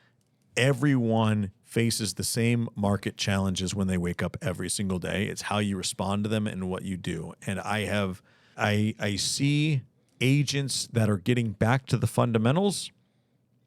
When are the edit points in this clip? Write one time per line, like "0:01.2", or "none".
0:08.5